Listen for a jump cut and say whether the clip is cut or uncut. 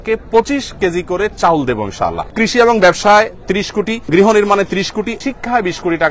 cut